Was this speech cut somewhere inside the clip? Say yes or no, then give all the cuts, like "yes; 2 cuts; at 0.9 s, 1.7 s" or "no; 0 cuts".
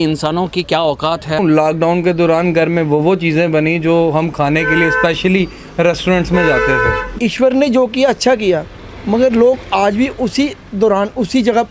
yes; 2 cuts; at 1.4 s, 7.1 s